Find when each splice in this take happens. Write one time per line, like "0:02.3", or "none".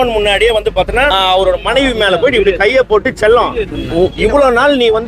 0:01.1